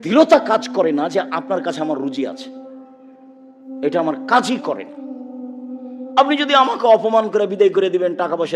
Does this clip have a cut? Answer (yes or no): yes